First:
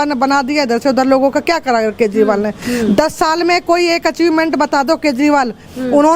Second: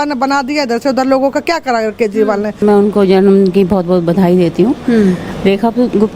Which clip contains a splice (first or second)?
second